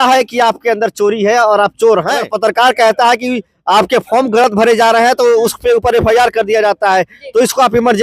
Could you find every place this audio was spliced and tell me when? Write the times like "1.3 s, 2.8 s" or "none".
2.2 s